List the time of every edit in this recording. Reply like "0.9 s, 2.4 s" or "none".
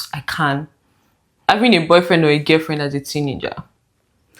1.5 s